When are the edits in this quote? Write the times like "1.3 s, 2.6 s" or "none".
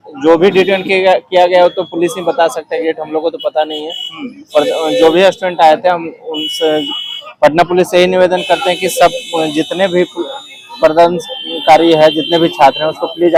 none